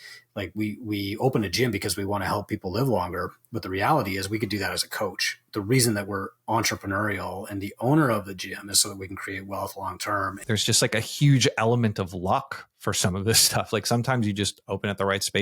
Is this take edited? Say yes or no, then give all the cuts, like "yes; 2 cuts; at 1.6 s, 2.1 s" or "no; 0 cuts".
yes; 1 cut; at 10.4 s